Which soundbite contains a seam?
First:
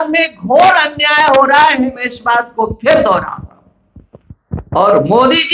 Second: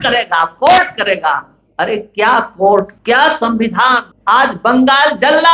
second; 2 cuts; at 2.9 s, 4.1 s

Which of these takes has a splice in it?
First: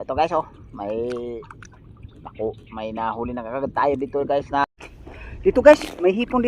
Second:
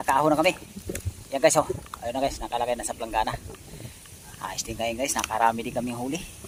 first; 1 cut; at 4.6 s

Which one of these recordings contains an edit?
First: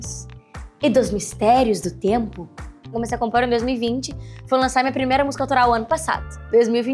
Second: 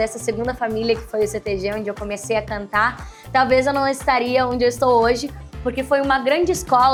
first; 1 cut; at 2.9 s

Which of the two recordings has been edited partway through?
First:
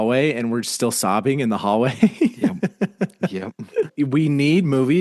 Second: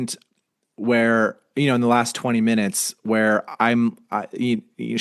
first; 1 cut; at 3.9 s

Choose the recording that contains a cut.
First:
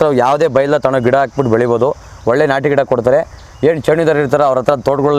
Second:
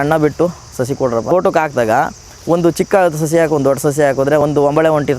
second; 2 cuts; at 1.3 s, 4.4 s

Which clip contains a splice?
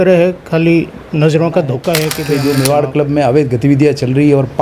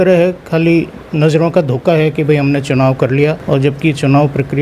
first; 1 cut; at 2.3 s

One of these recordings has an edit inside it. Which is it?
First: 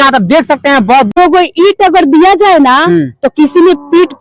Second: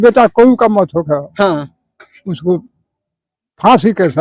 first; 1 cut; at 1.1 s

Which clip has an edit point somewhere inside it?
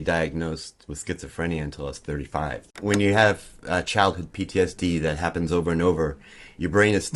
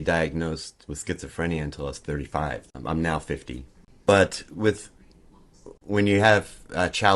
first; 1 cut; at 2.7 s

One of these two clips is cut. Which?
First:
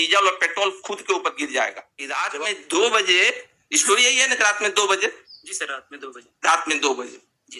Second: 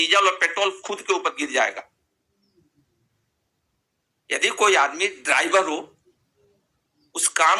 first; 1 cut; at 2.2 s

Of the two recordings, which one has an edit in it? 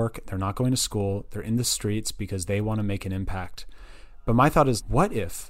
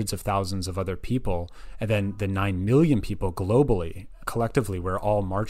second; 1 cut; at 4.2 s

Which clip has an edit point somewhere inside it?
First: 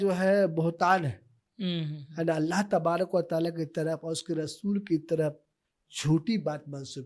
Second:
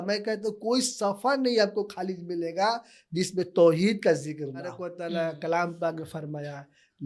second; 1 cut; at 4.8 s

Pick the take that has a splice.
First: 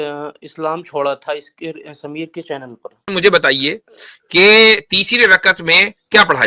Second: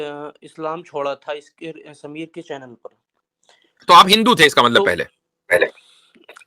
first; 1 cut; at 3.1 s

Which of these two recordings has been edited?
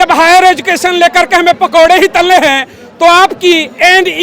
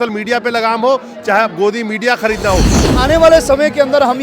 second; 1 cut; at 2.8 s

